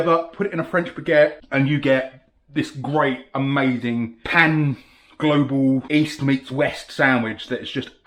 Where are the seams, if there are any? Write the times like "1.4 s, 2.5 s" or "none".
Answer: none